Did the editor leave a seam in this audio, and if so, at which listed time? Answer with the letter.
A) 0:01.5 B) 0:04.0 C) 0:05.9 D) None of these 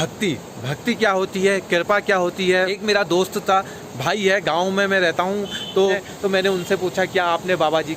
C